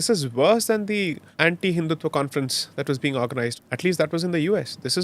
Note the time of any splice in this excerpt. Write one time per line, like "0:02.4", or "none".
0:01.2
0:03.5